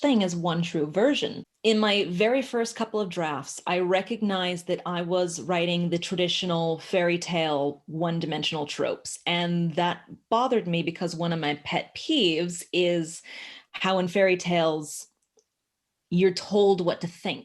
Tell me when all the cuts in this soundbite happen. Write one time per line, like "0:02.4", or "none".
0:01.3